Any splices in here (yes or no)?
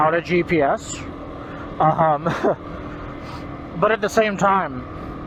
no